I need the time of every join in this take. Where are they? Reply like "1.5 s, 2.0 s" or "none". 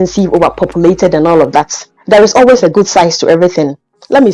none